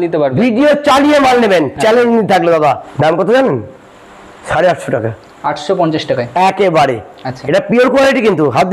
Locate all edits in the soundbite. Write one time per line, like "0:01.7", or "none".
0:02.9